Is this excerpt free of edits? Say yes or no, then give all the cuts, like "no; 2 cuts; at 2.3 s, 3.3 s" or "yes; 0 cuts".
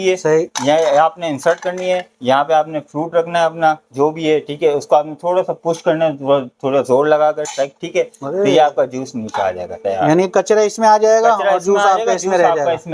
yes; 0 cuts